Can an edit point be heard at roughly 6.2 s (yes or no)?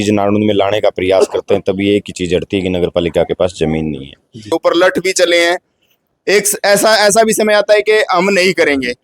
no